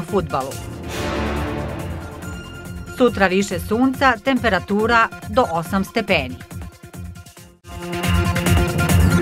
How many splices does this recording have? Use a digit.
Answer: 1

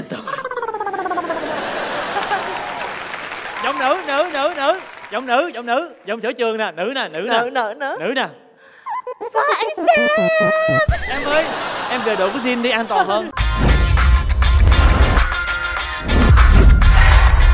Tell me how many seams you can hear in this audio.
1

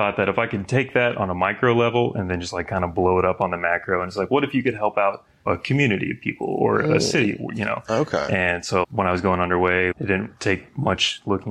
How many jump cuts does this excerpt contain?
2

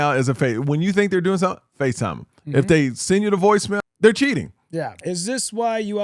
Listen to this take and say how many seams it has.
2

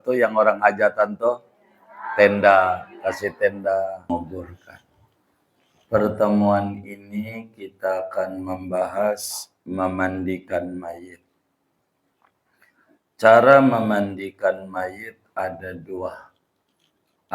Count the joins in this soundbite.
1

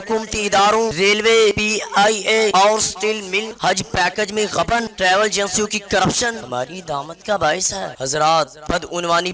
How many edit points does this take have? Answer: 7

